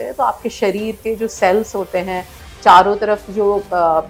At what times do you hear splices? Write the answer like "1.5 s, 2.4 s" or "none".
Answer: none